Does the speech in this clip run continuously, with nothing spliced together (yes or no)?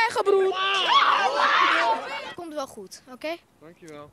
no